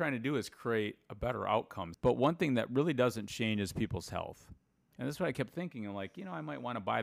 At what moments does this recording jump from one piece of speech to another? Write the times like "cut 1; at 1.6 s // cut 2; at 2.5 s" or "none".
cut 1; at 1.8 s